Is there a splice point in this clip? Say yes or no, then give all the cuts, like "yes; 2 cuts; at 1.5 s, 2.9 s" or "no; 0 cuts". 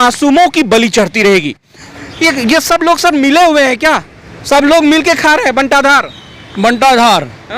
yes; 1 cut; at 1.9 s